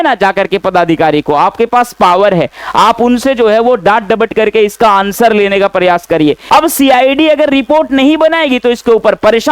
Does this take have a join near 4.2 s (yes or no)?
no